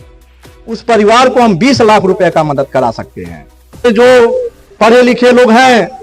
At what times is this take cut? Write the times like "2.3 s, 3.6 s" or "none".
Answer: 3.9 s